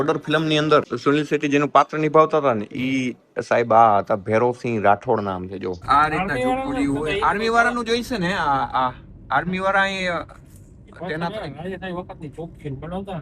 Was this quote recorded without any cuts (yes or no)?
no